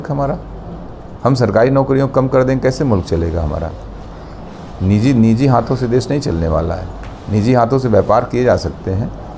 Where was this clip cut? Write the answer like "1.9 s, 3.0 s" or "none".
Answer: none